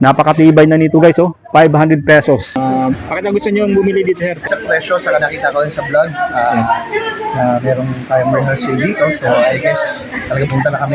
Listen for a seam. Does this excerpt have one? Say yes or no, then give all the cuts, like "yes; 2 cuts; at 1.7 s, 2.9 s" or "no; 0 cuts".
yes; 2 cuts; at 2.6 s, 4.4 s